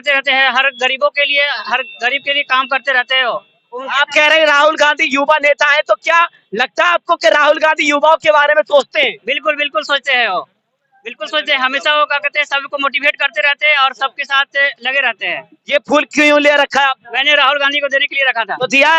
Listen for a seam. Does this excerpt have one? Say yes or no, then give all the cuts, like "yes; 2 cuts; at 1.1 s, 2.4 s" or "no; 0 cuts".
no; 0 cuts